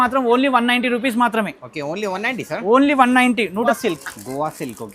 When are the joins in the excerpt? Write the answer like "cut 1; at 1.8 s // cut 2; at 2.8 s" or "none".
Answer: cut 1; at 3.7 s